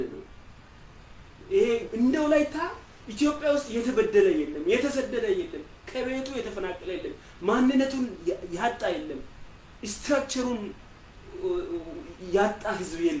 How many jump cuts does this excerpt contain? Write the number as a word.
zero